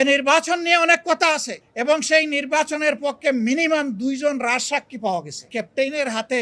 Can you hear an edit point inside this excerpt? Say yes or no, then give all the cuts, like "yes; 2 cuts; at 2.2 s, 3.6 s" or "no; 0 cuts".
yes; 1 cut; at 5.5 s